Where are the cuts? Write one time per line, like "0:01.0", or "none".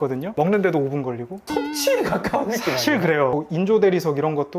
0:03.3